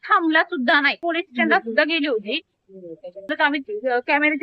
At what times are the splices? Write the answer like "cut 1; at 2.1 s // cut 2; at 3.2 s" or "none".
cut 1; at 1.0 s // cut 2; at 3.3 s